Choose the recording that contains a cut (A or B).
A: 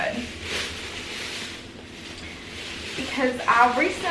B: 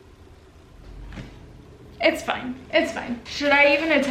B